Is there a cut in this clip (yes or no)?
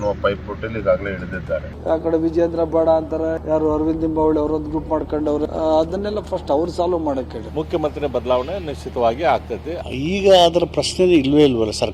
yes